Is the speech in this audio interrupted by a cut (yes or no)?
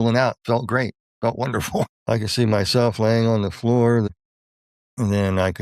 yes